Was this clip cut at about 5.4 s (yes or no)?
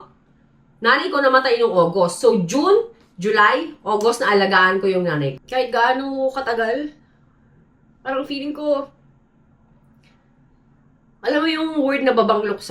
yes